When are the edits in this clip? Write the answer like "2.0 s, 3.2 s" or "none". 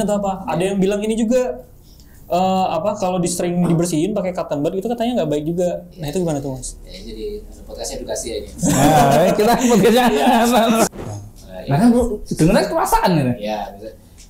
10.9 s

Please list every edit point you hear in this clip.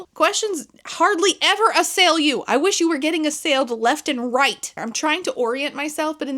4.7 s

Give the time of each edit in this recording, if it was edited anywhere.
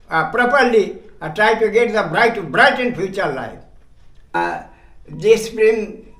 4.3 s

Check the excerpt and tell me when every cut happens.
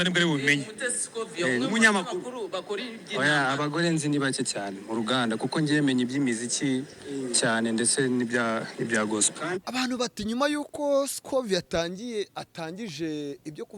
9.7 s

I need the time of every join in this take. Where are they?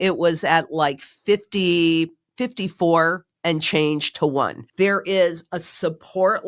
3.3 s, 4.6 s

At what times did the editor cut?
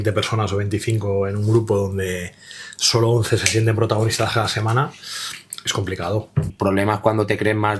6.4 s

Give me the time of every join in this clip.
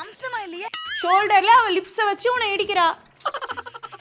3.1 s

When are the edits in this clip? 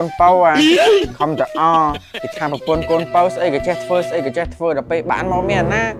none

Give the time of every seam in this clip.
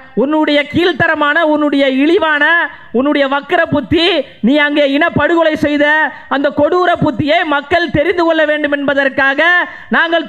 none

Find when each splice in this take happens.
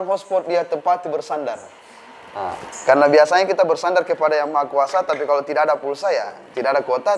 none

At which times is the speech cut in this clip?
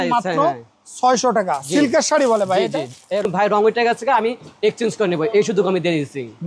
3.3 s

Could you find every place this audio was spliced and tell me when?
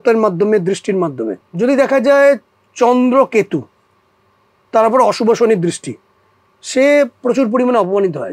1.4 s

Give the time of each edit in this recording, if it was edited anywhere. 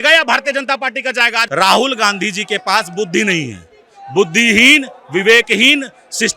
1.4 s

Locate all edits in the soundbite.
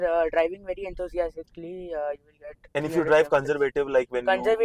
none

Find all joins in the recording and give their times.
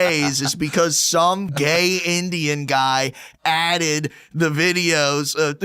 1.5 s

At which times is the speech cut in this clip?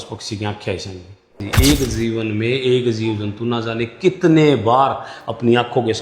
1.5 s

